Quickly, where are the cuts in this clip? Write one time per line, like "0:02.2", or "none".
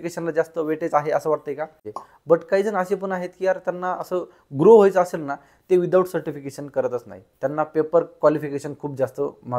0:01.9